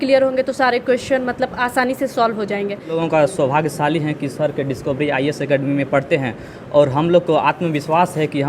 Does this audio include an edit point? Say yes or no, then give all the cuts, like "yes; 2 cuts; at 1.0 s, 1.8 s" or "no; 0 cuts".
yes; 1 cut; at 3.0 s